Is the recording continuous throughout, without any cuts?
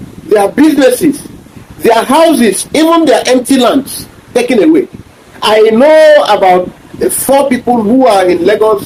yes; 0 cuts

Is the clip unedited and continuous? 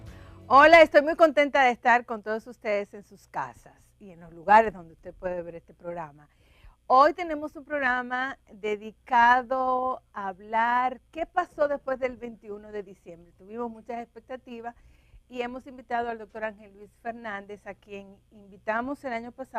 no; 1 cut; at 15.0 s

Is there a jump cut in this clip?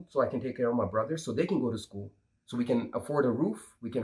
no; 0 cuts

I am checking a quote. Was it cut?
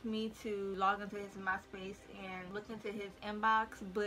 no; 0 cuts

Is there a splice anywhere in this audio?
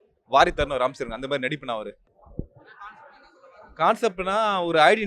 no; 0 cuts

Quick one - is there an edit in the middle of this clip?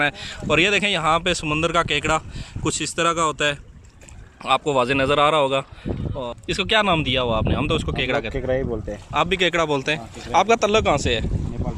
no; 0 cuts

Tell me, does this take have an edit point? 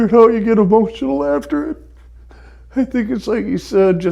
no; 0 cuts

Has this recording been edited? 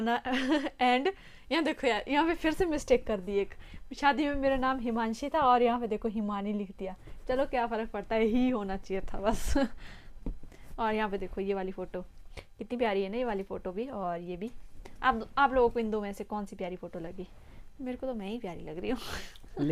no; 0 cuts

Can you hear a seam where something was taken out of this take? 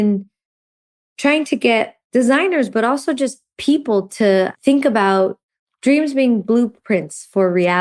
no; 0 cuts

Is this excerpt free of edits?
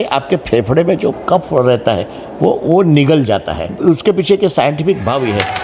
no; 2 cuts; at 1.2 s, 3.7 s

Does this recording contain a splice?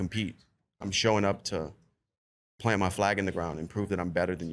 no; 0 cuts

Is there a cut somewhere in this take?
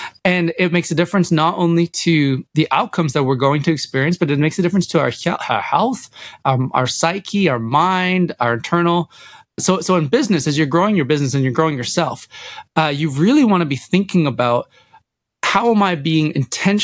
yes; 2 cuts; at 2.5 s, 9.5 s

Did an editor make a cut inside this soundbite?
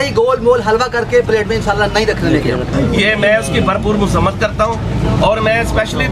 yes; 1 cut; at 2.7 s

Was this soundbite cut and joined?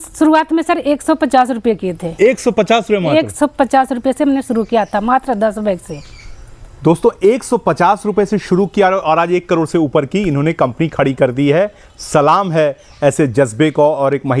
no; 0 cuts

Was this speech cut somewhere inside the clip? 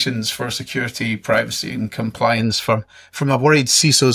no; 0 cuts

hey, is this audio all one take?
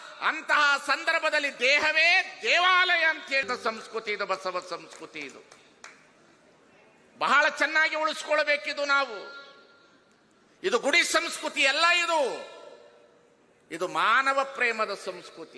no; 1 cut; at 3.4 s

